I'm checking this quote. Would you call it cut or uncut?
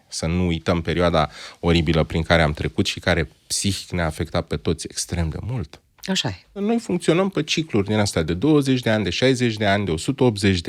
cut